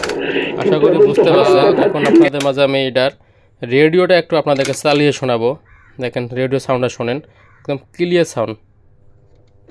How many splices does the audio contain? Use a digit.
1